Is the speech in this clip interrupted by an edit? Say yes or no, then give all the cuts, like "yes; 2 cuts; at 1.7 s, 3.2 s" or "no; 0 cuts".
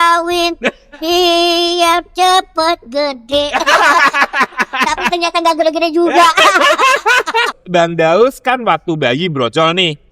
yes; 1 cut; at 7.6 s